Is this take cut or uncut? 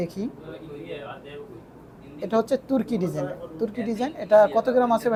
uncut